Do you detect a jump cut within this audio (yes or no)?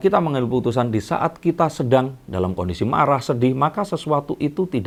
no